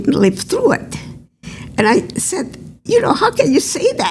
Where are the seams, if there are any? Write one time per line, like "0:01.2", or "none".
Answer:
0:02.2

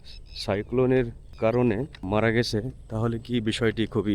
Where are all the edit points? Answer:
0:01.3
0:02.0

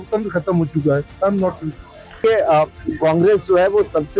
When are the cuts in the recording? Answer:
0:02.2

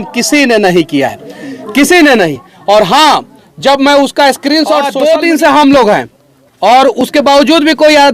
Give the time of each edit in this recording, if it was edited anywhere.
0:04.9

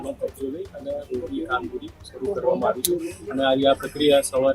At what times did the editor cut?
0:03.1

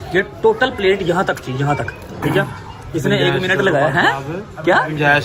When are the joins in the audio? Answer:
none

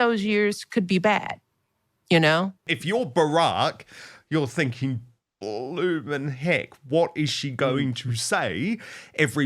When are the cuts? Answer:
0:02.7

